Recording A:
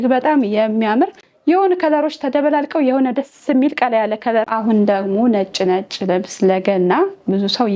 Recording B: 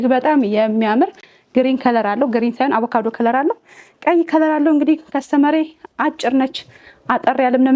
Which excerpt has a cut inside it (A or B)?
A